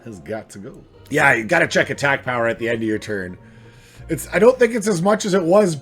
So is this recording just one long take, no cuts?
no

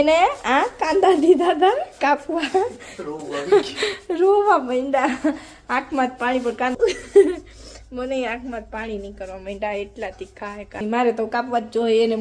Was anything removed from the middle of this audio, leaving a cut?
no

